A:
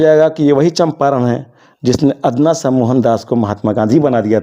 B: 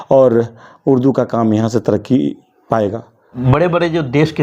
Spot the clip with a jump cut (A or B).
B